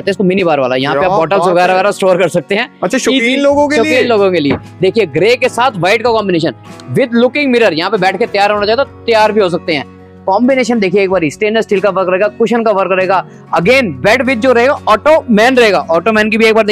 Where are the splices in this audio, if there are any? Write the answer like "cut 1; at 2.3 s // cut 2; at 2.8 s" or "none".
none

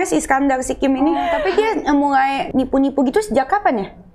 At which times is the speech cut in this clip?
cut 1; at 1.2 s // cut 2; at 2.5 s

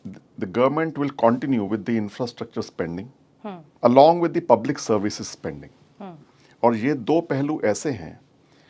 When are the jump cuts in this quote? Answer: cut 1; at 3.7 s

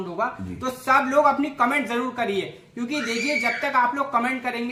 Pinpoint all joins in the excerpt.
none

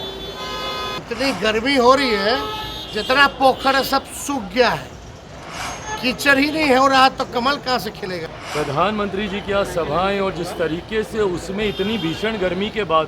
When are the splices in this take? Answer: cut 1; at 0.9 s // cut 2; at 8.2 s

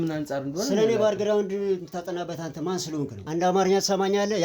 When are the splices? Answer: cut 1; at 3.2 s

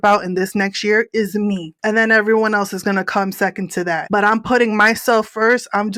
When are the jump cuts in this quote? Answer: none

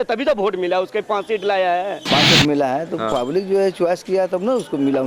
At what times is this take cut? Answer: cut 1; at 2.0 s

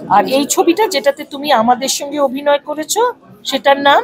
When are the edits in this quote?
none

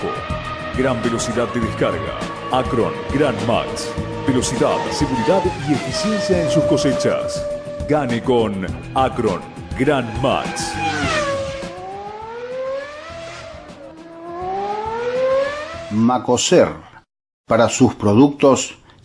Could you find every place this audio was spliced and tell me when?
cut 1; at 15.7 s

